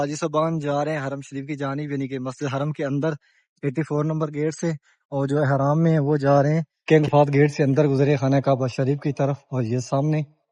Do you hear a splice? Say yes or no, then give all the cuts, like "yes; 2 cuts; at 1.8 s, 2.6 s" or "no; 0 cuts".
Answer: yes; 1 cut; at 6.7 s